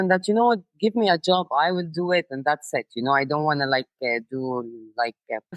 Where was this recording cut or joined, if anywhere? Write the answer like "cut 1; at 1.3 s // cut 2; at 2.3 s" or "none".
none